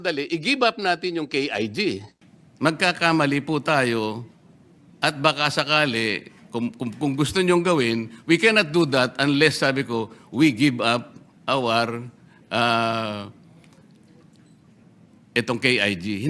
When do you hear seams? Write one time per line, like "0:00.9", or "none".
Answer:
0:02.1